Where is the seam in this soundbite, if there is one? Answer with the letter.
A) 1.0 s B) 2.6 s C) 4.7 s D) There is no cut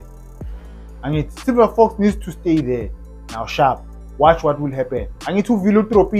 D